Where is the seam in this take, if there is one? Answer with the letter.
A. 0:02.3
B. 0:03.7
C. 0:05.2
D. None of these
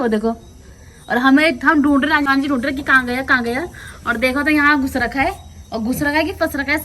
A